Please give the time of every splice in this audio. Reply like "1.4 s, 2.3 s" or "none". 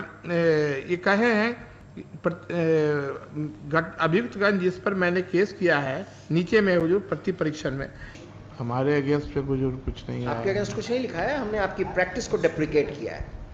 8.2 s